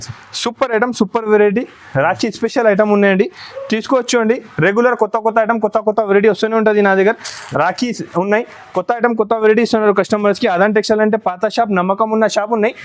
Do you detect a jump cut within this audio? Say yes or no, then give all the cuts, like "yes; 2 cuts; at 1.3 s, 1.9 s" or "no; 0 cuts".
no; 0 cuts